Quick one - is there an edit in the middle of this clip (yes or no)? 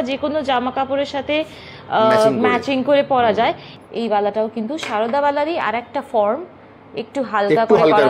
yes